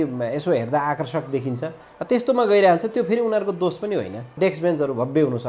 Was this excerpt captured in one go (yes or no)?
no